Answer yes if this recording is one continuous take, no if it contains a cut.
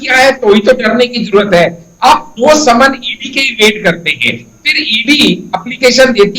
yes